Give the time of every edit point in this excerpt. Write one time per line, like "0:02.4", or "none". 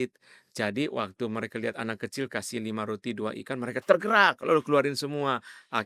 none